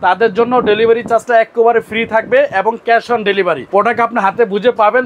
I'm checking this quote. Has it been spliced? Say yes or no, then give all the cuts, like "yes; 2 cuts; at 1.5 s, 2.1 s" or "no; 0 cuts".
yes; 1 cut; at 3.6 s